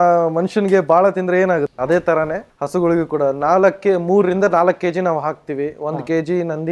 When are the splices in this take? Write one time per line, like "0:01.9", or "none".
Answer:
none